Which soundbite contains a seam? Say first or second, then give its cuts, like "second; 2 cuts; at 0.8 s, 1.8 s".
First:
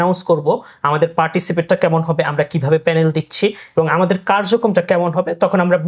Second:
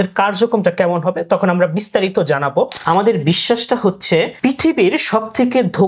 second; 2 cuts; at 2.8 s, 4.3 s